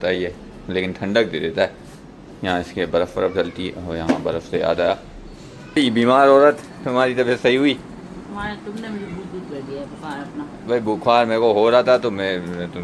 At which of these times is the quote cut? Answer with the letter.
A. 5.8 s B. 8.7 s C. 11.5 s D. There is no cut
A